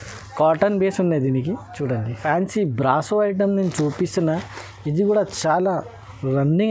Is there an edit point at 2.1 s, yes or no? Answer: yes